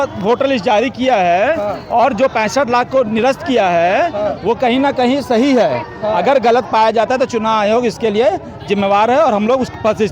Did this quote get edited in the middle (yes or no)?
no